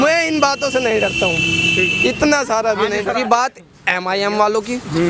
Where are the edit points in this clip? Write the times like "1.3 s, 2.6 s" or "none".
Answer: 3.2 s